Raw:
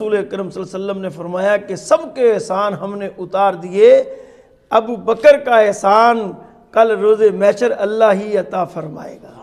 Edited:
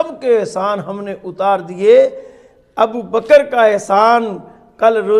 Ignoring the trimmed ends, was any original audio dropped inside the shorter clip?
no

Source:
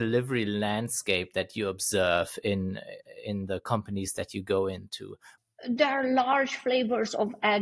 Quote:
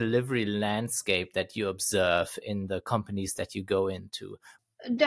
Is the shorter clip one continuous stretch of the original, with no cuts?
no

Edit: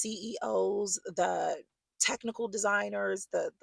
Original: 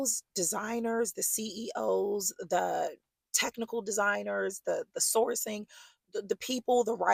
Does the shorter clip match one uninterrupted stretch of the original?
yes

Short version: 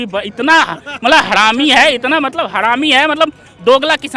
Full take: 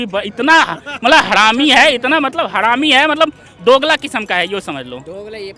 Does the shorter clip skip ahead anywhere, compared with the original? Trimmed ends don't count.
no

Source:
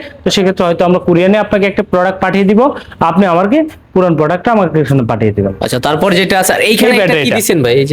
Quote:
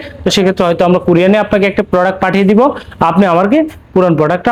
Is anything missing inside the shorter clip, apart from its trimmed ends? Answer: no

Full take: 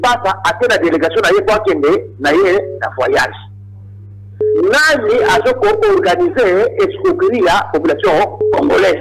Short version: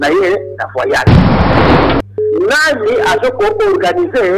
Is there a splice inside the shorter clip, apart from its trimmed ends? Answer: no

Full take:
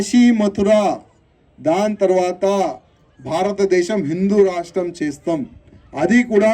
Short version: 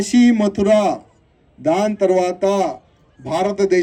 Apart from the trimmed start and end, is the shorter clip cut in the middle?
no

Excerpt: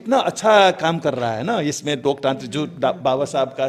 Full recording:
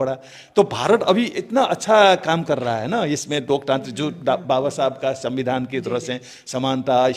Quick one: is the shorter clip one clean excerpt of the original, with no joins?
yes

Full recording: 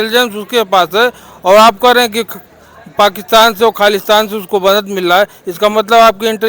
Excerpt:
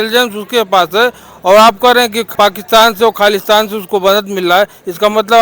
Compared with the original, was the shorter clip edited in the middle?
yes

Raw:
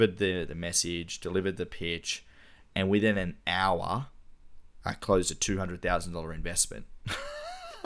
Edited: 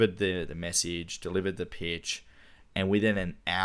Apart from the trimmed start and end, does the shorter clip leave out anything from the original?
no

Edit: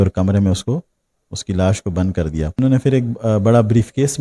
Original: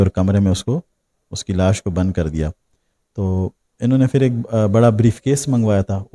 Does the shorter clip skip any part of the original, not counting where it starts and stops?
yes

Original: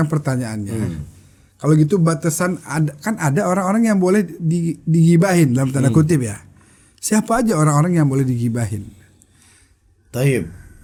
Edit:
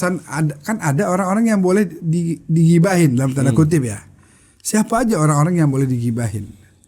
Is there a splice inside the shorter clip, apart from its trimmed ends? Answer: no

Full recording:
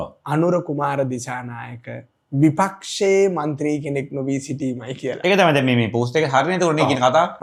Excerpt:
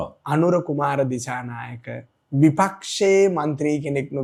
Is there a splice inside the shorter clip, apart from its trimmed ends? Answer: no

